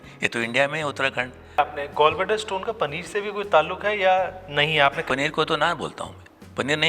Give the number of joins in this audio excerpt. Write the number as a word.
two